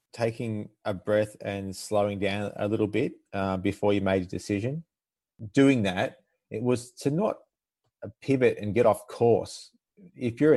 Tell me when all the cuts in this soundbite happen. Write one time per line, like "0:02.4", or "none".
0:05.2